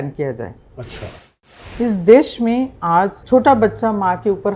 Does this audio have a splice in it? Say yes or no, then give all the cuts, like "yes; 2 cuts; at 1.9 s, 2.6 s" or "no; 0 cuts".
yes; 2 cuts; at 1.2 s, 3.2 s